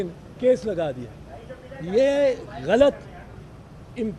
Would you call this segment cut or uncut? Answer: uncut